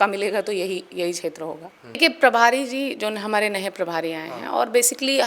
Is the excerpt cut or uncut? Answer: cut